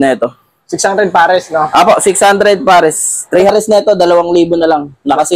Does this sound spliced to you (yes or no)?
yes